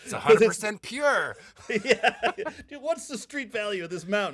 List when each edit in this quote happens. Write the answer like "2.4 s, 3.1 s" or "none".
none